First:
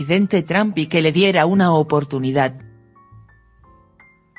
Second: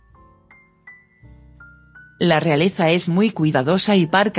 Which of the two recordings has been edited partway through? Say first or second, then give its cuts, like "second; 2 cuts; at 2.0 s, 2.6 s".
first; 1 cut; at 2.2 s